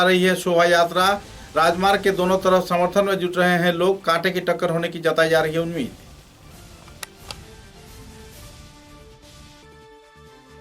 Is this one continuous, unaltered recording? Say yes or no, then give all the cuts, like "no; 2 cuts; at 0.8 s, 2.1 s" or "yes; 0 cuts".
yes; 0 cuts